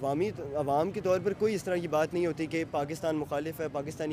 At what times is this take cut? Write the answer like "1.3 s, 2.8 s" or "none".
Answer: none